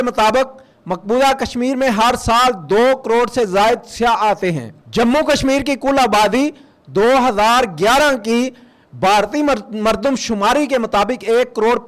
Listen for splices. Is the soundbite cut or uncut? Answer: uncut